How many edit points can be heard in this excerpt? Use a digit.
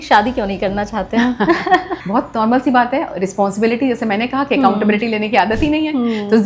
1